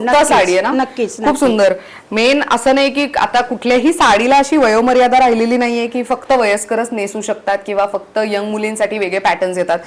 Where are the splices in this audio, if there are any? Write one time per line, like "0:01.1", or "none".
none